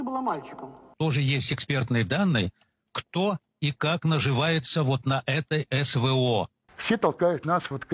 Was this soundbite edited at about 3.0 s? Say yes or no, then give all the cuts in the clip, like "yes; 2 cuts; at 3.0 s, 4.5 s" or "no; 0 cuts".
no; 2 cuts; at 0.9 s, 6.6 s